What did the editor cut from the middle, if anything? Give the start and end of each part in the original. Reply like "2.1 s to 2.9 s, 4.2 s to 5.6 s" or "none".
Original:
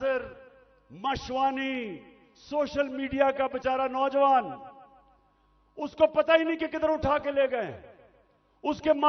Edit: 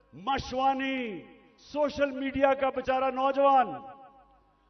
none